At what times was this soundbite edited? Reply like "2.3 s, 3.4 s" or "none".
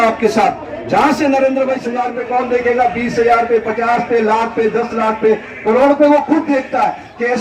1.9 s